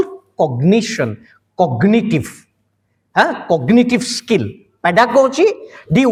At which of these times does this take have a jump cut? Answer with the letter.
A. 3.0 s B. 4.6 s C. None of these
C